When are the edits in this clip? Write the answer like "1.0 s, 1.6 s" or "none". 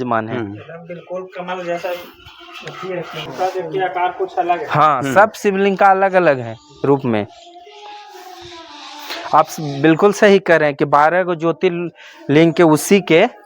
3.2 s